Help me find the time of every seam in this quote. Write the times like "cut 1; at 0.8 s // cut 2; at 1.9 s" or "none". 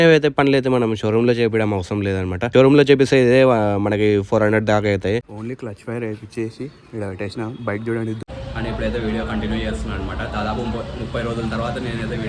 cut 1; at 5.2 s // cut 2; at 8.2 s